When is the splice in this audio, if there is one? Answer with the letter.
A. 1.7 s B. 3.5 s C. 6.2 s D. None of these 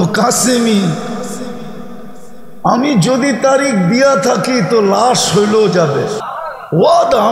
C